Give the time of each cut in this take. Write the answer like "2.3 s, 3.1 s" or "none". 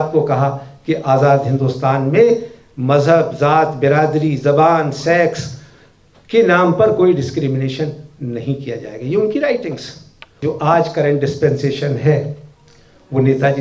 10.4 s